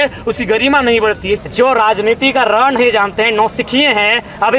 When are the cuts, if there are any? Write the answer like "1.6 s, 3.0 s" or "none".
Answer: 1.4 s